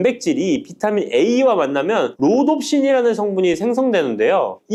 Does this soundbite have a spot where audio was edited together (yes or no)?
no